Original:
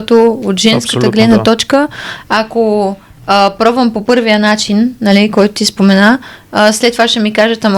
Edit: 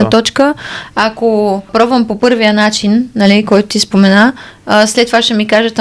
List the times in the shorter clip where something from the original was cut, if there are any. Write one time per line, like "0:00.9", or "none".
0:01.7

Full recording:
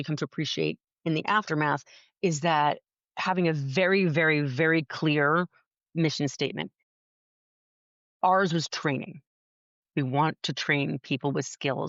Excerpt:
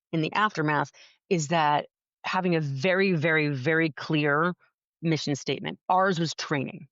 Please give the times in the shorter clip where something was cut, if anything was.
0:05.8

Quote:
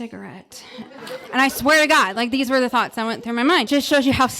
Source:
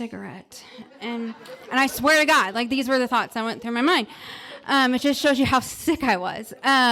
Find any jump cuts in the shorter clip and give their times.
0:01.0
0:03.7

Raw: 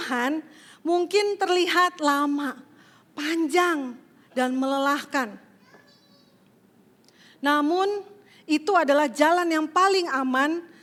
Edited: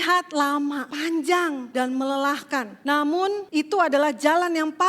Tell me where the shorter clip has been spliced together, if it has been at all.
0:00.9
0:01.6
0:02.7
0:03.4

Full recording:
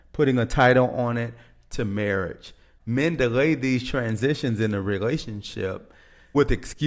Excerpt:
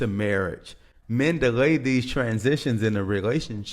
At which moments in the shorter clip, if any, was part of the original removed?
none

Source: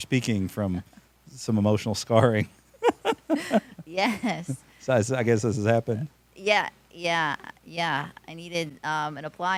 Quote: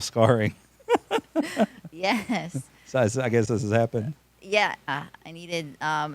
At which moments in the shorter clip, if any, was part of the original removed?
0:04.9

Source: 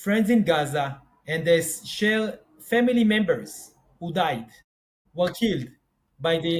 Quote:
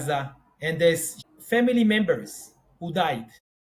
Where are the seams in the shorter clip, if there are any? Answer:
0:01.2

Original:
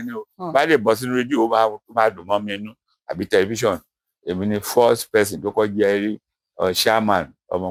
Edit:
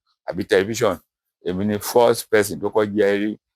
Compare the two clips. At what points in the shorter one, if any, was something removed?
none

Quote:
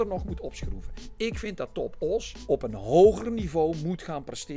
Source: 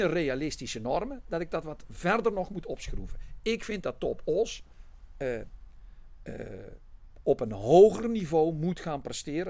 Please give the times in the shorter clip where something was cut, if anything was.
0:02.3

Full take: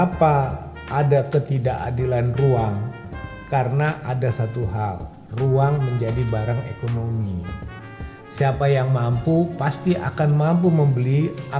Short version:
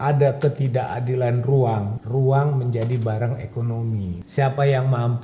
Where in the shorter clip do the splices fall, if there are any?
0:02.0
0:04.2

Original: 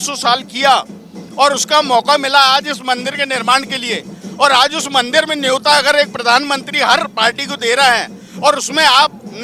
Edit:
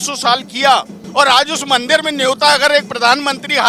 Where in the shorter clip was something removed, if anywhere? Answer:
0:01.0

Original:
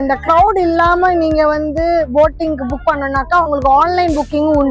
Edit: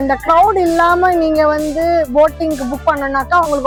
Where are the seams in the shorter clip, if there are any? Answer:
none

